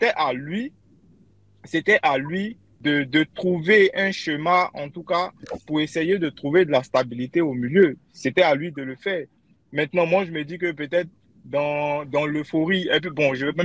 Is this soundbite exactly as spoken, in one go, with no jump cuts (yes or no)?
yes